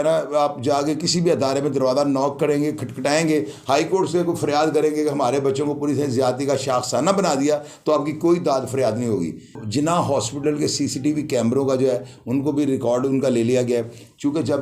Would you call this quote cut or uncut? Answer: cut